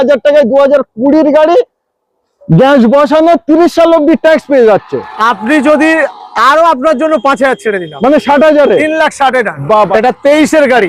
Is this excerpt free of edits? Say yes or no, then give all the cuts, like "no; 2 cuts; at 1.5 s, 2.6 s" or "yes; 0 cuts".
no; 1 cut; at 9.9 s